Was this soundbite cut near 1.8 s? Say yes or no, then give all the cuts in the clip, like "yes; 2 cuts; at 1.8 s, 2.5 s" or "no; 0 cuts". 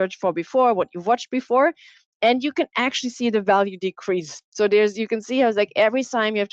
no; 0 cuts